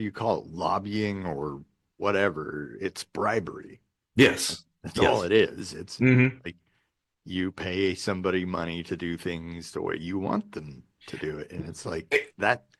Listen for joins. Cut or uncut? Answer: uncut